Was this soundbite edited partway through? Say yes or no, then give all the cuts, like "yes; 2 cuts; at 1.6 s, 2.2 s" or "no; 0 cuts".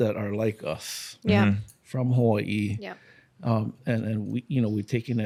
no; 0 cuts